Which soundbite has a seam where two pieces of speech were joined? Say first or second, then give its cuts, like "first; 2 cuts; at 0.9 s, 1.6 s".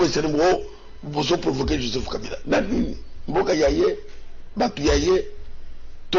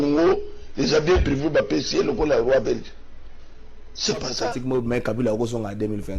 second; 1 cut; at 4.6 s